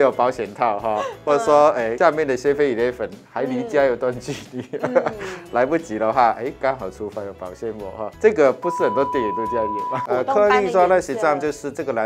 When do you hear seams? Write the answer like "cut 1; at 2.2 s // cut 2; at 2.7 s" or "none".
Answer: cut 1; at 1.9 s // cut 2; at 8.1 s // cut 3; at 10.0 s